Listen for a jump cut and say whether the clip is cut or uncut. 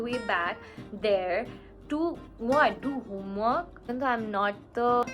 cut